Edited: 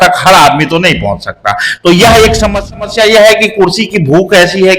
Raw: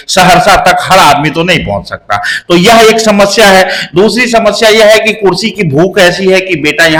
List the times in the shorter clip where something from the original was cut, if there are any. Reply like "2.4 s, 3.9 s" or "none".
2.7 s